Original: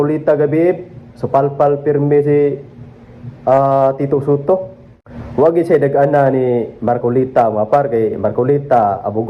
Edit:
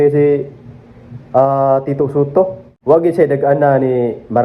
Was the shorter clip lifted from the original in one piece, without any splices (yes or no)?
no